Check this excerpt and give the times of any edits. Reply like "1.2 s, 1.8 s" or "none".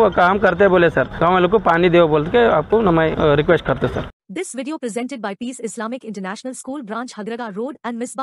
1.1 s, 3.1 s, 4.0 s